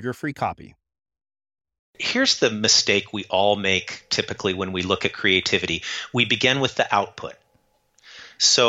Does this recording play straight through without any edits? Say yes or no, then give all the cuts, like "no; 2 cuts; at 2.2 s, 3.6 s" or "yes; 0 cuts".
no; 1 cut; at 2.0 s